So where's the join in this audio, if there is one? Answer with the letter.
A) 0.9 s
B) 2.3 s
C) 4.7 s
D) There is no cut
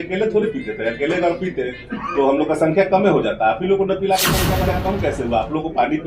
C